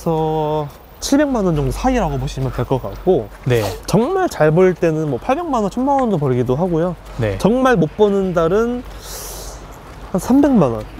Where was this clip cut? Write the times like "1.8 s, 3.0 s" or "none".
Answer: none